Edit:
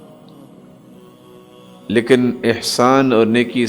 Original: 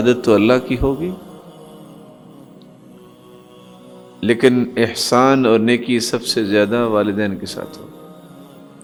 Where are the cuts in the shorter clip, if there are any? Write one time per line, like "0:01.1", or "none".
0:01.9